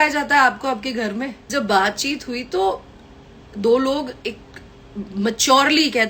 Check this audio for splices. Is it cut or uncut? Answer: cut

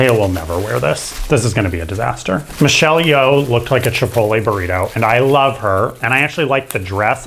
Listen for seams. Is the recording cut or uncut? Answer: cut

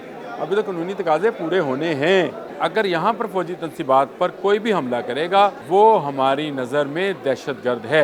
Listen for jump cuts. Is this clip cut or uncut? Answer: cut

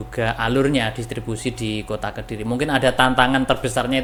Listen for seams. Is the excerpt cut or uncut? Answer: uncut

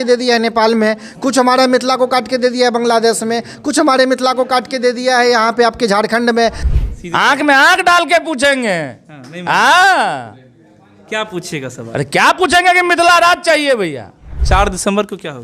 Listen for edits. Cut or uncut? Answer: cut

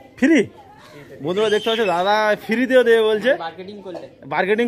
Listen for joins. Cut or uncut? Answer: uncut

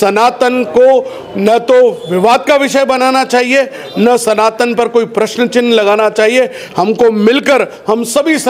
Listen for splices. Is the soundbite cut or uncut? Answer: uncut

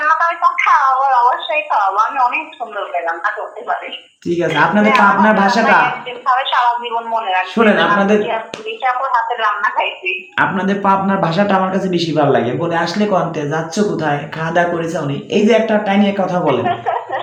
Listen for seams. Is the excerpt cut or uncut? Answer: uncut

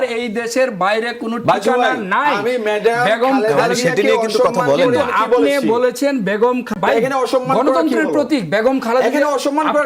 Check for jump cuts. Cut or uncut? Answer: cut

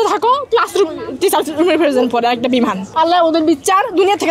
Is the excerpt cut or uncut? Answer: cut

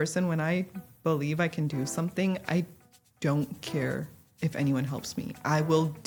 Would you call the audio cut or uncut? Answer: uncut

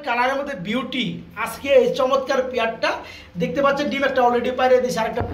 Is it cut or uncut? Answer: uncut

